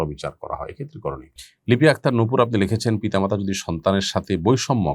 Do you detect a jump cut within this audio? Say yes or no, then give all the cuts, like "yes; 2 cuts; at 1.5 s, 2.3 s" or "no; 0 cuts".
yes; 1 cut; at 1.3 s